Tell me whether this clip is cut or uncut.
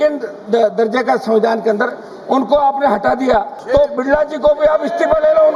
cut